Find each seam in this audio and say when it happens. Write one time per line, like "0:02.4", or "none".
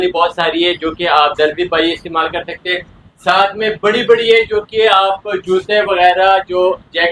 none